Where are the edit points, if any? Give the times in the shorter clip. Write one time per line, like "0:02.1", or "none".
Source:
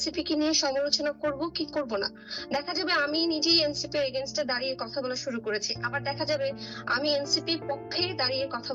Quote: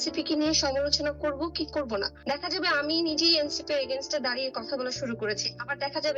0:02.1